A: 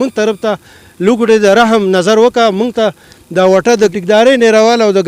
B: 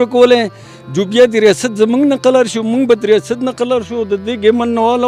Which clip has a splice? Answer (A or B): A